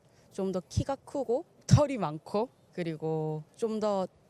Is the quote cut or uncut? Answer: uncut